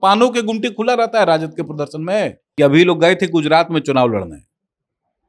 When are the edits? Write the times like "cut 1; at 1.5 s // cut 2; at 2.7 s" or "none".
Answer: cut 1; at 2.4 s